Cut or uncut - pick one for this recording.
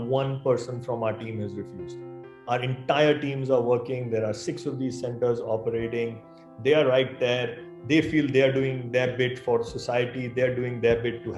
uncut